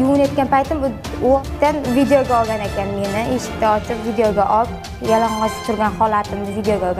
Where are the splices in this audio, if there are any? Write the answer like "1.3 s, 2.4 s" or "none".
1.4 s